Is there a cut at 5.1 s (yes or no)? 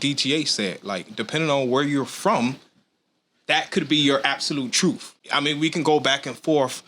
yes